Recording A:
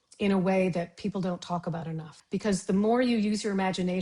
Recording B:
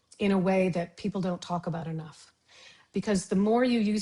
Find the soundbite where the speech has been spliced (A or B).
A